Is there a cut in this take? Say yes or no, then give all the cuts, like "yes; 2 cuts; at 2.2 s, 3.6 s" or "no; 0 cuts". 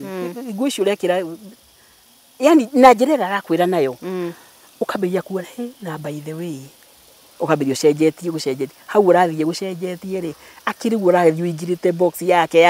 no; 0 cuts